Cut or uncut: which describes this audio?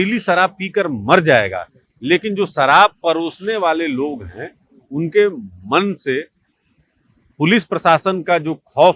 uncut